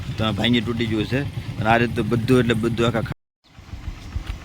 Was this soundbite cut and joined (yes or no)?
yes